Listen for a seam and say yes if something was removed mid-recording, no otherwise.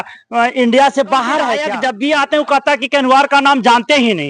yes